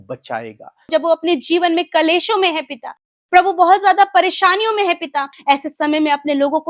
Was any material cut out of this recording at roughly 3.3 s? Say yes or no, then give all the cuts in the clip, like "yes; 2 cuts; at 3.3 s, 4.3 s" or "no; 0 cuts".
no; 2 cuts; at 0.9 s, 5.3 s